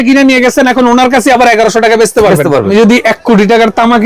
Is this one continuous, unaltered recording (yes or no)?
no